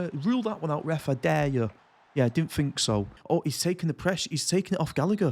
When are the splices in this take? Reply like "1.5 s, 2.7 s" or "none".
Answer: 3.2 s